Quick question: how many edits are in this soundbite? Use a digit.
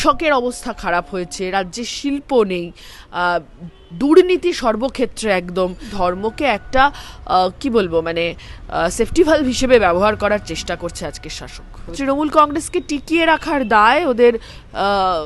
2